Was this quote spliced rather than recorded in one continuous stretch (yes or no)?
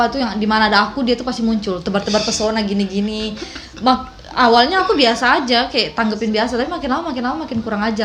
no